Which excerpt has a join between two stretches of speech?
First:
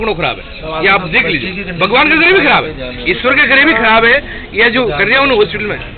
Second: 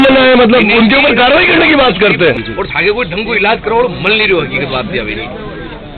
second; 1 cut; at 2.5 s

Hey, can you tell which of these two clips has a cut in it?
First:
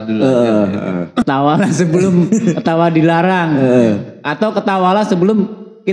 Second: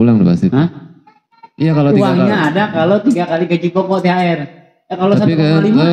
first; 1 cut; at 1.2 s

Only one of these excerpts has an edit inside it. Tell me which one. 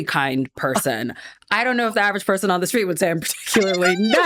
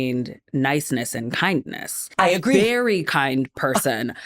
second; 1 cut; at 2.1 s

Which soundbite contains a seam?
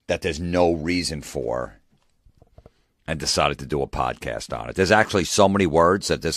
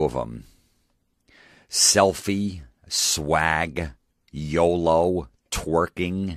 first; 1 cut; at 3.6 s

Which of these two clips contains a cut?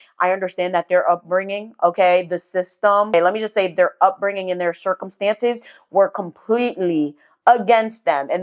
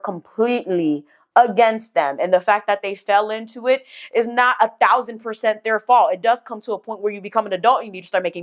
first; 1 cut; at 3.1 s

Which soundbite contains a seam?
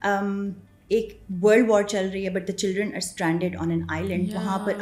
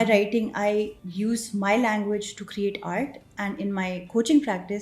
second; 1 cut; at 1.0 s

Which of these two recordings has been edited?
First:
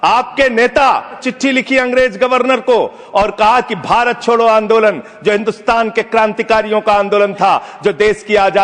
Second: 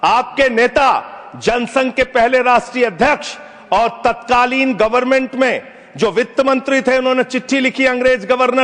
first; 1 cut; at 1.3 s

